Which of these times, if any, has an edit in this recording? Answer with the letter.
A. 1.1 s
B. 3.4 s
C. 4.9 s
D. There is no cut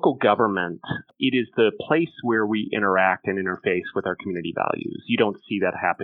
A